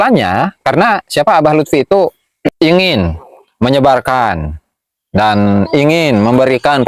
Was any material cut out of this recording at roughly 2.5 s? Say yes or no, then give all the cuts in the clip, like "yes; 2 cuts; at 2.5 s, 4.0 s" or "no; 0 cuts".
yes; 1 cut; at 2.5 s